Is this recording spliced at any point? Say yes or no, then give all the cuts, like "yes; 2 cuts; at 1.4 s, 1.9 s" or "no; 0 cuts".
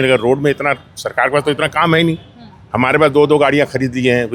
no; 0 cuts